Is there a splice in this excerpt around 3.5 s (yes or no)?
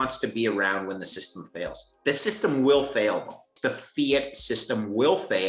yes